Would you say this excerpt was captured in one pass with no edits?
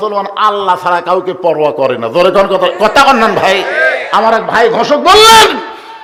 yes; 0 cuts

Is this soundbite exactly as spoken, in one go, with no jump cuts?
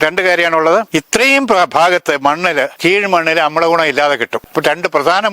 no; 3 cuts; at 0.9 s, 2.7 s, 4.5 s

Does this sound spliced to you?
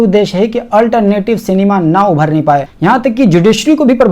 yes; 1 cut; at 2.7 s

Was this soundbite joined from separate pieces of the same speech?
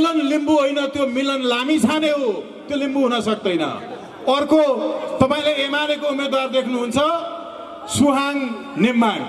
no; 0 cuts

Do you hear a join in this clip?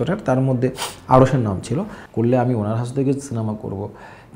yes; 1 cut; at 2.0 s

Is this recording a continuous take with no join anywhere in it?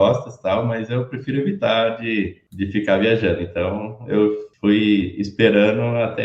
no; 2 cuts; at 2.4 s, 4.5 s

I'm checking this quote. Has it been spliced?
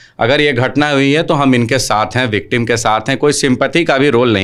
no; 0 cuts

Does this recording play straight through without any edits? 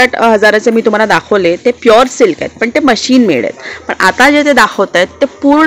yes; 0 cuts

